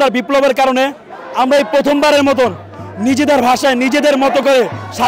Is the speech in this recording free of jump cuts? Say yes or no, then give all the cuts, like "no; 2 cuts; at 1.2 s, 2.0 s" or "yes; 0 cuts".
yes; 0 cuts